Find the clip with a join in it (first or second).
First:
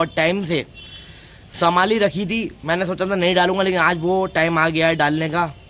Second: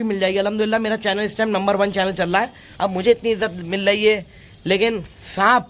second